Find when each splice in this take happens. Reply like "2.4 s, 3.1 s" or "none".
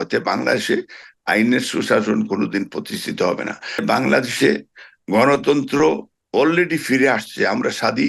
3.8 s